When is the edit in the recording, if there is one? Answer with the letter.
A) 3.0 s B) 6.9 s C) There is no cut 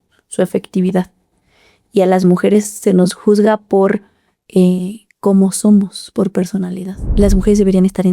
B